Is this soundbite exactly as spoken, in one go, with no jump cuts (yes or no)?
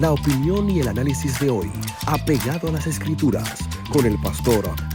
yes